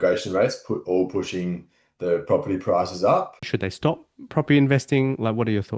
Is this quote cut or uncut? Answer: cut